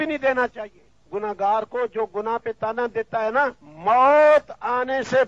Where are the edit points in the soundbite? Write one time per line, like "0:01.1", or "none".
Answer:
0:03.7